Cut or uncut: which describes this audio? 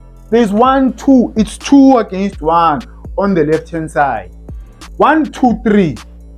cut